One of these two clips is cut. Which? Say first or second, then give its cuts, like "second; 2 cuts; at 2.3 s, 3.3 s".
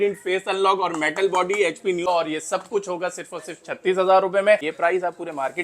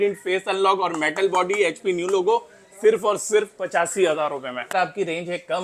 first; 2 cuts; at 2.0 s, 4.7 s